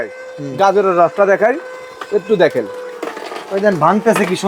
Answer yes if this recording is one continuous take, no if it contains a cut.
yes